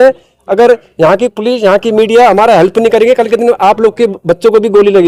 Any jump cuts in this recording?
no; 0 cuts

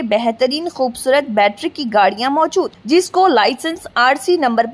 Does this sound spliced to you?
no; 0 cuts

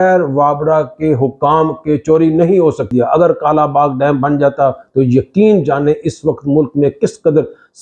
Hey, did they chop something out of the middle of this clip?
yes; 1 cut; at 2.8 s

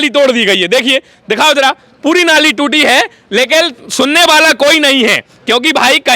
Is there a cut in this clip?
no; 0 cuts

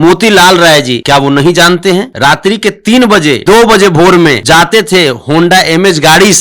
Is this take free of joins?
no; 4 cuts; at 1.0 s, 2.1 s, 3.4 s, 4.4 s

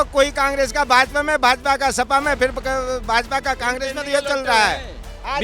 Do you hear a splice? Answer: no; 0 cuts

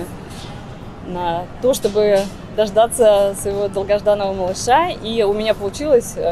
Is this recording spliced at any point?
no; 0 cuts

